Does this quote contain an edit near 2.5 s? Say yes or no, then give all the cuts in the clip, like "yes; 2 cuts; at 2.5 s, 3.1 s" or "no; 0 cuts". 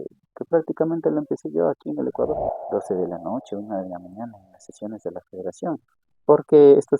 yes; 1 cut; at 2.5 s